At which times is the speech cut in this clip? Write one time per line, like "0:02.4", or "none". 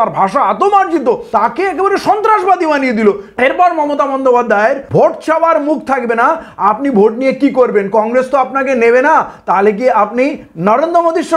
0:01.2
0:03.3
0:04.8